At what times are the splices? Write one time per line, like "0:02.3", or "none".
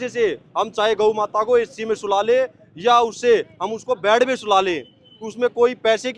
none